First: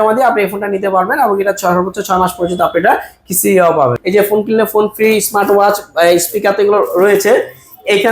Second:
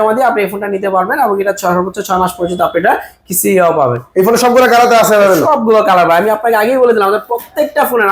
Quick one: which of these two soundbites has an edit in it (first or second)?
first